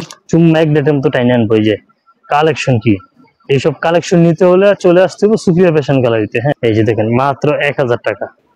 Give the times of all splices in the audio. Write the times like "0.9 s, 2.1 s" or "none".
6.5 s